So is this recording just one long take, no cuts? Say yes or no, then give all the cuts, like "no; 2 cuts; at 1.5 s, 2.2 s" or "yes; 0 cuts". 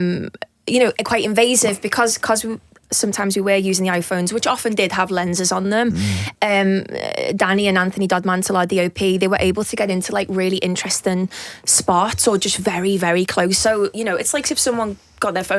yes; 0 cuts